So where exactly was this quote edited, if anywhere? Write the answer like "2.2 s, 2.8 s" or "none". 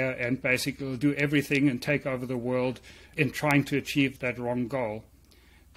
3.1 s, 4.1 s